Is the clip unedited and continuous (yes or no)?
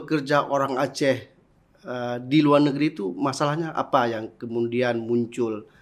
yes